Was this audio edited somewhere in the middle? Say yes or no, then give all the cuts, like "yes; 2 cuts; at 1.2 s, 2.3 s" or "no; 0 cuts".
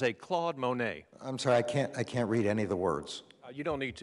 no; 0 cuts